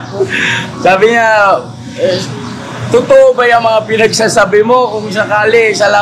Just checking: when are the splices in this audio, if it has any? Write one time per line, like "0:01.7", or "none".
none